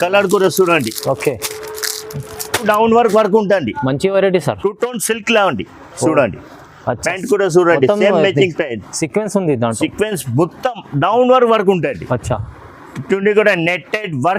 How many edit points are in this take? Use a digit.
1